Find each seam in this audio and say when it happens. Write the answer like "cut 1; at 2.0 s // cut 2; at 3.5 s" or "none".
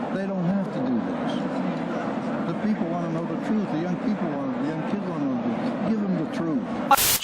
cut 1; at 0.9 s